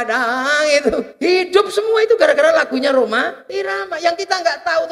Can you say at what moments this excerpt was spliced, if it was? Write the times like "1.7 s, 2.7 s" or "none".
1.1 s, 3.4 s